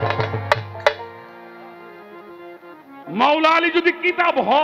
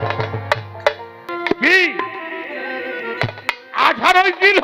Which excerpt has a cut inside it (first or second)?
second